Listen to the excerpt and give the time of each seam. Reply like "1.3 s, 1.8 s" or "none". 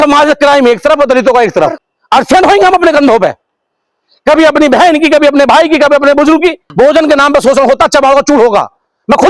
1.8 s, 6.6 s